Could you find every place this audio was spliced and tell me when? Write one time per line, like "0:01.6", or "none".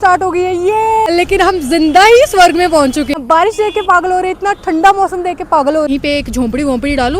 0:01.1
0:03.1
0:05.9